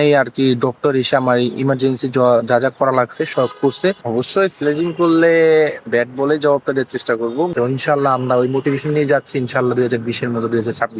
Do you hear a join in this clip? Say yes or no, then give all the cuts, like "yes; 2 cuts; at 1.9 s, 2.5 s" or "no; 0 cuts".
yes; 2 cuts; at 4.0 s, 7.5 s